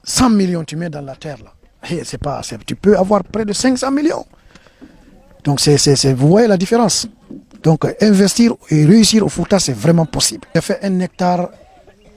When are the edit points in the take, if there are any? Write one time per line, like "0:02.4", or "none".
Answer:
0:10.6